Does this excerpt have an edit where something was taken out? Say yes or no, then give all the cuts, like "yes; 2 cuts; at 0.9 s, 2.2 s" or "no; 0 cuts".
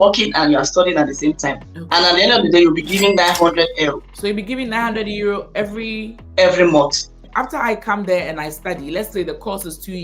yes; 1 cut; at 7.2 s